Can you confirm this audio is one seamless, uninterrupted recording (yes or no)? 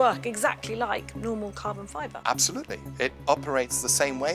no